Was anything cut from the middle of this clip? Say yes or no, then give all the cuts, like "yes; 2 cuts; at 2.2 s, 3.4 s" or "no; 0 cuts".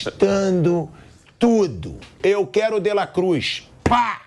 yes; 1 cut; at 2.2 s